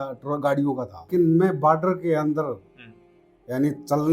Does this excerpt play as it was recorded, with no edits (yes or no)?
no